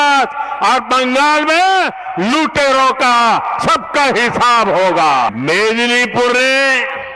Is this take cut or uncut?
cut